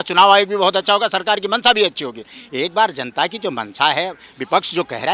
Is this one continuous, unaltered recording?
yes; 0 cuts

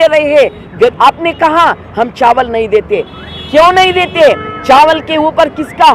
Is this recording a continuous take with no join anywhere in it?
no; 1 cut; at 0.9 s

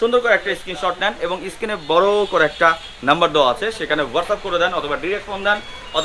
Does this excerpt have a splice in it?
no; 0 cuts

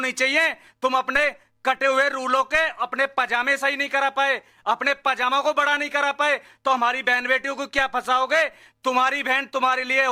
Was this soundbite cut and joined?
no; 0 cuts

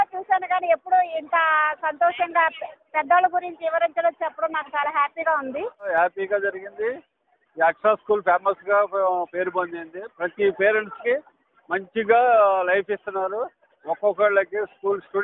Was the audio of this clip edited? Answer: yes; 1 cut; at 5.9 s

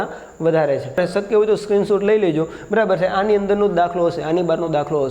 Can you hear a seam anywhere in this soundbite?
yes; 1 cut; at 1.0 s

